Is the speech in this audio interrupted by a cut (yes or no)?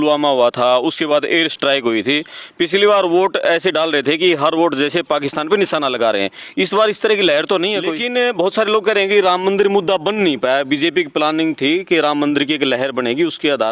yes